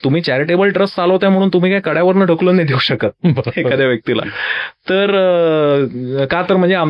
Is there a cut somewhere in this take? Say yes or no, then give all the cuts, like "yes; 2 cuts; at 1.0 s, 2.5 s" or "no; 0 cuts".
no; 0 cuts